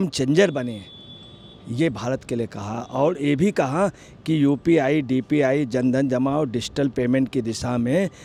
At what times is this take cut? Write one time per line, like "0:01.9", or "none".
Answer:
none